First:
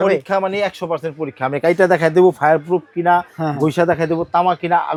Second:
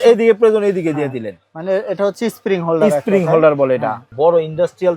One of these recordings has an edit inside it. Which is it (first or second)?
second